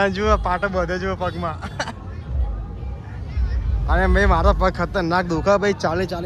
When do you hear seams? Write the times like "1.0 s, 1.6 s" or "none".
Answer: none